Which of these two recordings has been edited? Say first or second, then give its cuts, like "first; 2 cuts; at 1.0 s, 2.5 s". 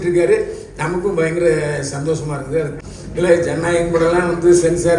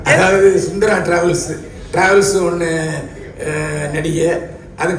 first; 1 cut; at 2.8 s